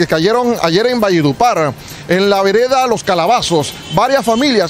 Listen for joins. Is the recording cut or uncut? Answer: uncut